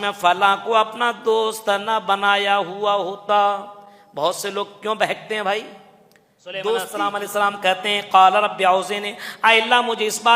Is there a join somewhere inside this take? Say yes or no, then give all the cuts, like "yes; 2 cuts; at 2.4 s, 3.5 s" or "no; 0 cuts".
yes; 1 cut; at 7.1 s